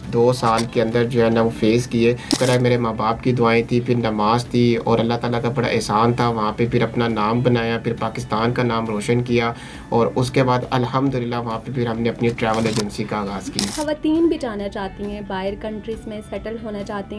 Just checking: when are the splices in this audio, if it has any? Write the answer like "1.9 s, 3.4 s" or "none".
2.3 s, 13.7 s